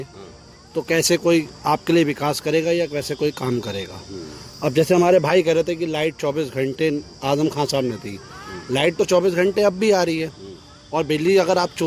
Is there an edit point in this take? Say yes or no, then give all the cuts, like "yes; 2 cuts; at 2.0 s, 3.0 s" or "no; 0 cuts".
no; 0 cuts